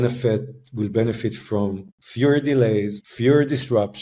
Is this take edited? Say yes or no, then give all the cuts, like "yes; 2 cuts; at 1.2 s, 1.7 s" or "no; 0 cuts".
yes; 1 cut; at 3.0 s